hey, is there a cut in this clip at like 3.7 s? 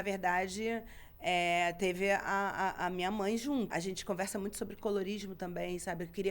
yes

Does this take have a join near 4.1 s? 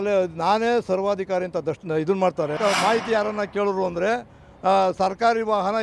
no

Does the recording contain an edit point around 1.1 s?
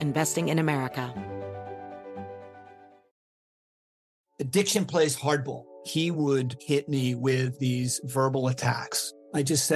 yes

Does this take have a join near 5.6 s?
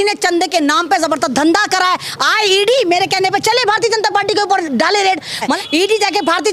yes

